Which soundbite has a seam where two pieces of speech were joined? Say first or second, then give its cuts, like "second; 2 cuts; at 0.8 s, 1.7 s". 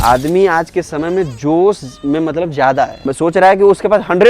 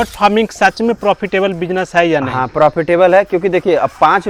first; 1 cut; at 3.0 s